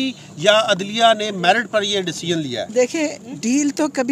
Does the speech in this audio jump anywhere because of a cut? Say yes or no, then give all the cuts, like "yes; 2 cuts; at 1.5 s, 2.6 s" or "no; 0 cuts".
yes; 1 cut; at 2.6 s